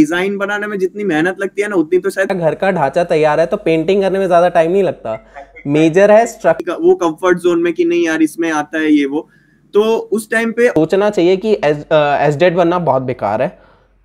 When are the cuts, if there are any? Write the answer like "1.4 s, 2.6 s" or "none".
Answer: 2.3 s, 6.6 s, 10.8 s

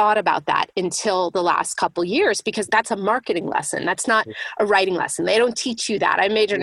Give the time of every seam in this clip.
2.6 s

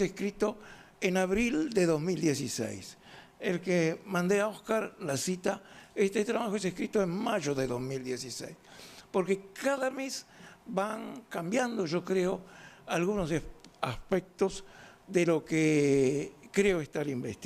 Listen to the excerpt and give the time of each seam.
4.2 s

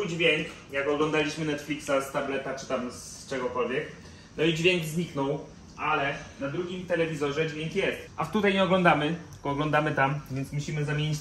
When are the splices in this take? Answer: none

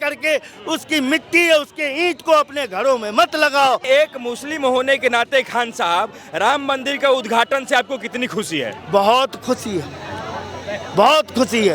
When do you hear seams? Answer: 3.9 s

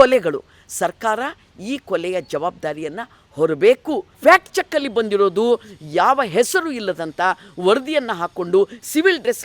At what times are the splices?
4.1 s

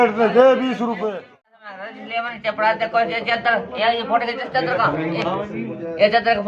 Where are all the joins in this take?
1.1 s

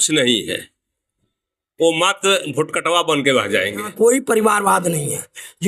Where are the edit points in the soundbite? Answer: 3.9 s

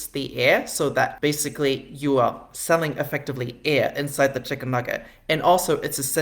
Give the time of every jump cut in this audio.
1.1 s

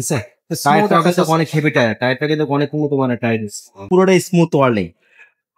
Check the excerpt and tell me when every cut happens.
3.8 s

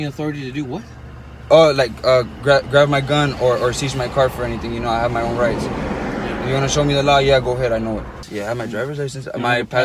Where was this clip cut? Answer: 8.2 s

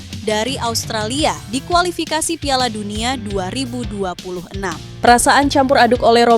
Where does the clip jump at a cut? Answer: 4.9 s

